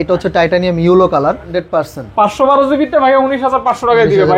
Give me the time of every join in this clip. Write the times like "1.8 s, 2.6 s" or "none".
1.5 s